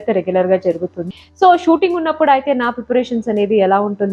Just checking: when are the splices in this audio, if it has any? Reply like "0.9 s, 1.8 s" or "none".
1.0 s